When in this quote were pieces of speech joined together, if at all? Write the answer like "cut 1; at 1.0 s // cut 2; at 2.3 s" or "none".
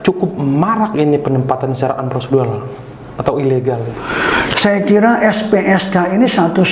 cut 1; at 3.9 s